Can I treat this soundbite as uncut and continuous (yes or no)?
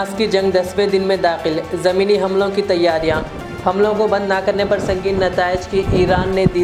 yes